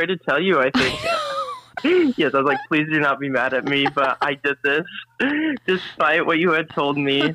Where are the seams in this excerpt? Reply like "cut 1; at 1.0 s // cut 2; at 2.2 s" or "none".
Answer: cut 1; at 1.8 s // cut 2; at 5.1 s